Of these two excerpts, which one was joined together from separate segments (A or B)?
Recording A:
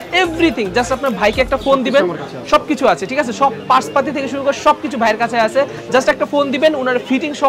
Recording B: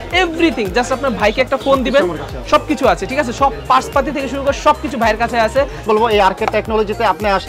B